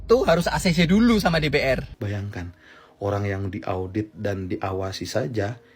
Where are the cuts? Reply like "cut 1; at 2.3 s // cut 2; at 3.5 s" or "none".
cut 1; at 1.9 s